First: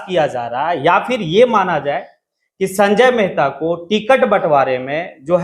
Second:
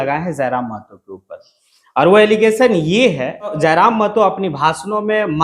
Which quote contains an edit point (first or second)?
second